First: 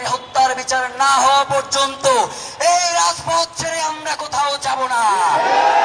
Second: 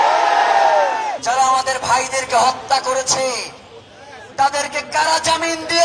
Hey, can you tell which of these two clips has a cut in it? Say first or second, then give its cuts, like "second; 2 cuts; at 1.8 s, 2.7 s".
second; 1 cut; at 1.2 s